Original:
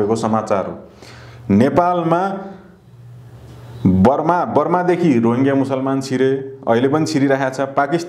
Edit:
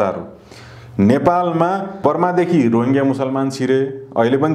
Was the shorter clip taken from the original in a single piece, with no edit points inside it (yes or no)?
no